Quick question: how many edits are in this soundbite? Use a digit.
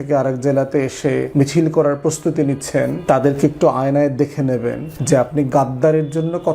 3